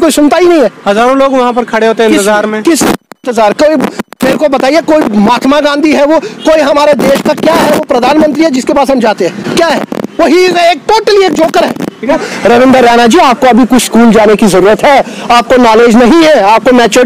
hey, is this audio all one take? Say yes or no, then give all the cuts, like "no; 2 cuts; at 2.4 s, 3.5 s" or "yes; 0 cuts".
no; 1 cut; at 12.1 s